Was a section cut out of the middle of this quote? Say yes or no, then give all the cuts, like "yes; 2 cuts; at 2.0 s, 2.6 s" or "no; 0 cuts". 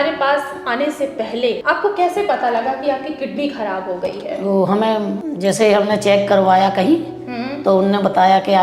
yes; 2 cuts; at 1.6 s, 5.2 s